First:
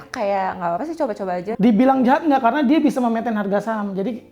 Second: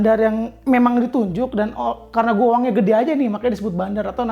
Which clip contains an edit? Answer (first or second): first